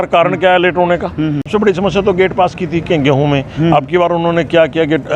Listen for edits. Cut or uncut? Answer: cut